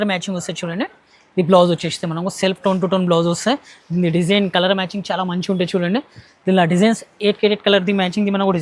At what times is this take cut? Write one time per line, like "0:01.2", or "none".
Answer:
none